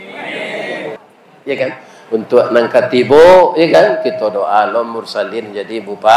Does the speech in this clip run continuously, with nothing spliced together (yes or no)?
no